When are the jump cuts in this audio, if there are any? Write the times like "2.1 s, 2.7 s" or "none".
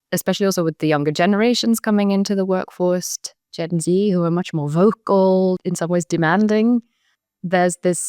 5.6 s